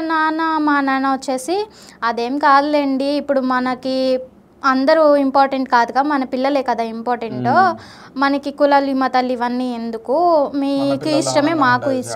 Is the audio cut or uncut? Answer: uncut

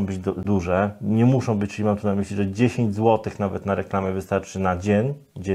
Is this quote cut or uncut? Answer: uncut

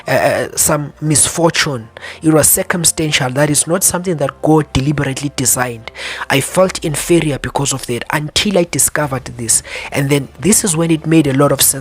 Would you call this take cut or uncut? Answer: uncut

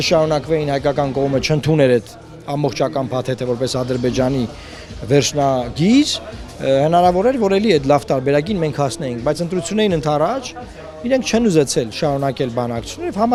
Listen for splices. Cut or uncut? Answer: uncut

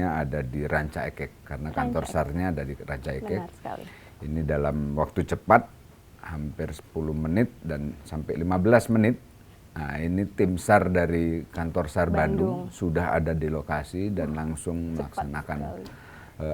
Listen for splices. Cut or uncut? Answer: uncut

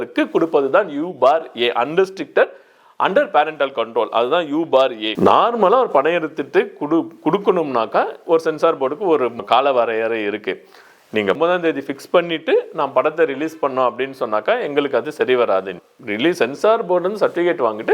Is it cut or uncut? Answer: cut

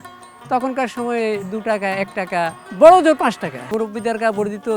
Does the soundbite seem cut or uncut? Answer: cut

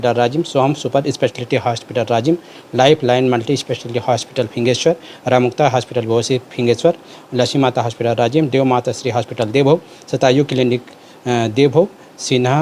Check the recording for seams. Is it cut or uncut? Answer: uncut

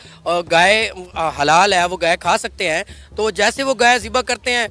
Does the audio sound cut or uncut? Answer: uncut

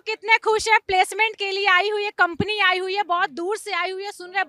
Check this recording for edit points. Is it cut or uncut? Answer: uncut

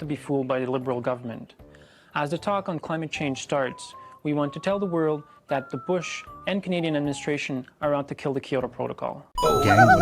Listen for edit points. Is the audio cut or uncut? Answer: cut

